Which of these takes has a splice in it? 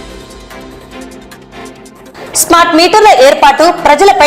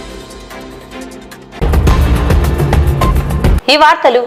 first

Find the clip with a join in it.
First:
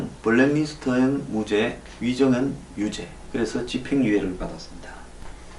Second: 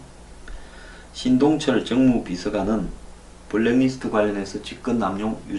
first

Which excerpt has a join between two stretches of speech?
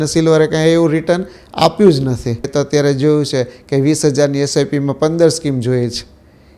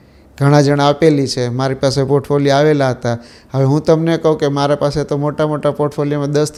first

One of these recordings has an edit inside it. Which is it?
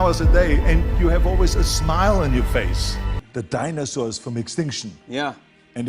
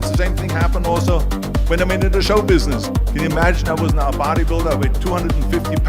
first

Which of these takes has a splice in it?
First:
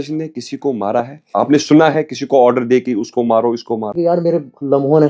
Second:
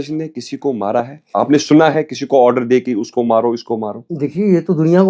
first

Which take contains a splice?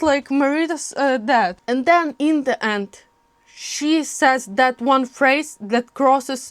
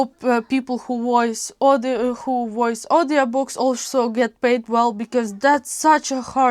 first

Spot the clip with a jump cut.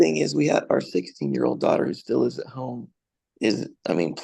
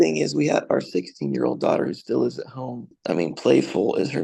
second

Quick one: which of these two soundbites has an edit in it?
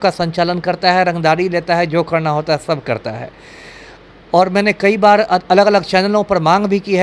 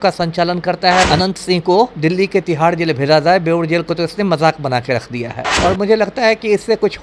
second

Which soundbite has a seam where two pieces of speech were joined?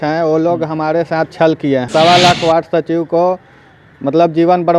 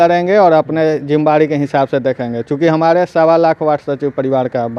first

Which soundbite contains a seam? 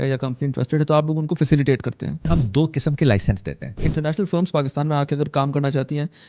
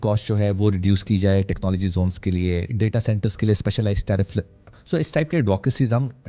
first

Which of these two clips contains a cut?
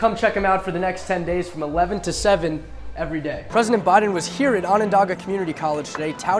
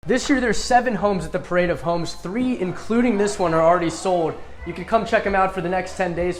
first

